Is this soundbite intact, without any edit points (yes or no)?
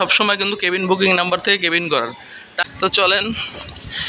no